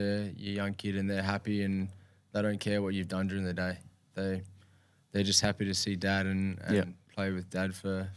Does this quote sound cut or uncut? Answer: uncut